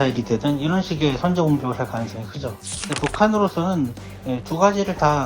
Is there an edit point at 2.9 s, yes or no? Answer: yes